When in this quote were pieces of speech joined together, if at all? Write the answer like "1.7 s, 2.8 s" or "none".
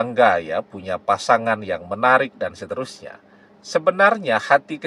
none